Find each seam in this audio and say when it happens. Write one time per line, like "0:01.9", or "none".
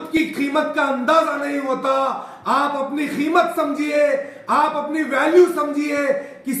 none

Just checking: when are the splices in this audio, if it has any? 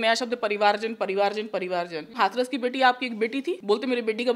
0:02.1
0:03.6

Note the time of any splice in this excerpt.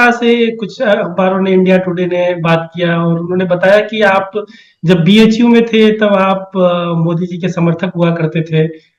none

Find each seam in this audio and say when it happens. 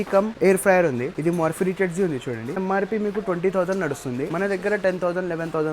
0:01.1
0:02.6
0:04.3

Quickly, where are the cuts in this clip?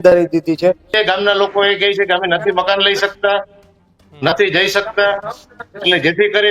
0:01.0

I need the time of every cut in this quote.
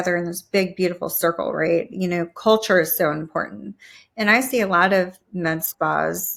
none

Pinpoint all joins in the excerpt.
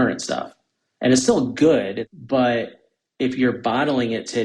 0:02.0

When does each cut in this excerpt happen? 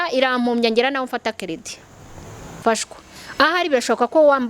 0:02.6

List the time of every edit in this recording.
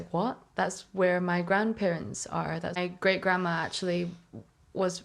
0:02.8

